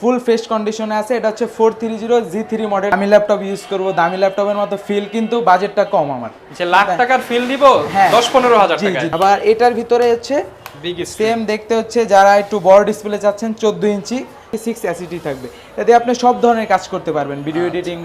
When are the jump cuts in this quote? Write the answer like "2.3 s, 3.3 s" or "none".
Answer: 2.9 s, 9.0 s, 14.5 s